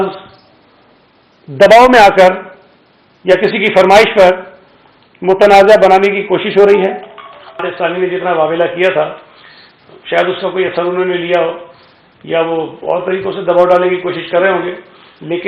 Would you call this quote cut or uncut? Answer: cut